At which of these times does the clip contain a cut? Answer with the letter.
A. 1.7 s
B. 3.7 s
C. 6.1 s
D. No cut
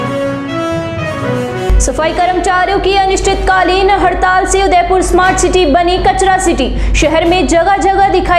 A